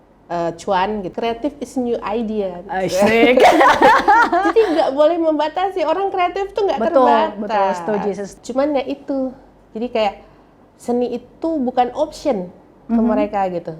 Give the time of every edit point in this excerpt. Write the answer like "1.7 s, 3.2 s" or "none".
1.1 s, 8.3 s

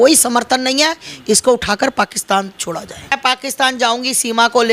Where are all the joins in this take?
3.1 s

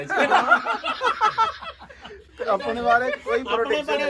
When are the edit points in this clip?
none

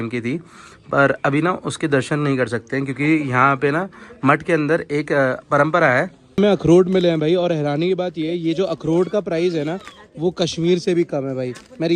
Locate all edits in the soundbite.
6.4 s

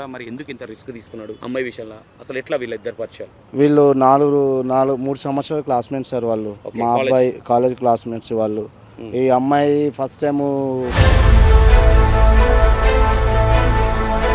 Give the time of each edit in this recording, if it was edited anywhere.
1.4 s, 6.6 s, 10.9 s

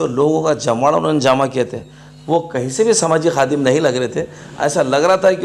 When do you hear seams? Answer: none

